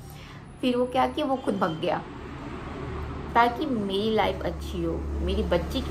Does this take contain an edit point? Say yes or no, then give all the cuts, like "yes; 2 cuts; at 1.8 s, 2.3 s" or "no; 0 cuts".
no; 0 cuts